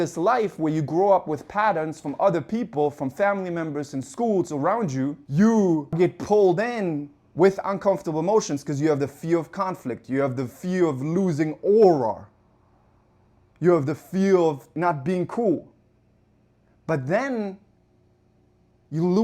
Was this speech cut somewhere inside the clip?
yes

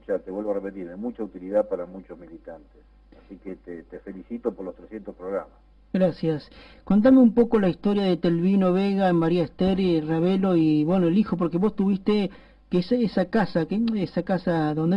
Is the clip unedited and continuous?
no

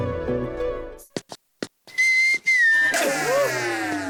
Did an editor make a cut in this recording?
no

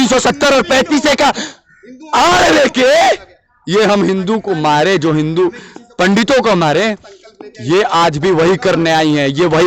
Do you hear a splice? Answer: no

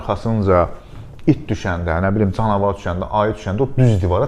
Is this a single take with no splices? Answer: yes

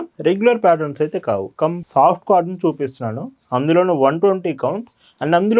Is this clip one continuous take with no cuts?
no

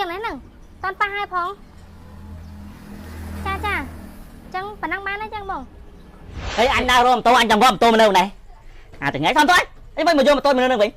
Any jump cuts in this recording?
yes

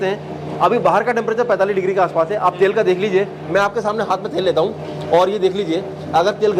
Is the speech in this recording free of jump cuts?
yes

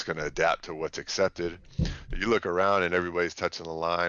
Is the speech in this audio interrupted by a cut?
no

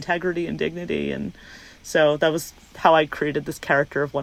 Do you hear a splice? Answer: no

